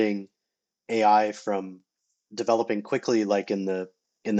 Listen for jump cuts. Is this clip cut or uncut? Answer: uncut